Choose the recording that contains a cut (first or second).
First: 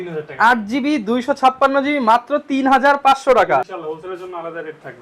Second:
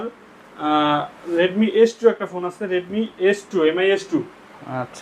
first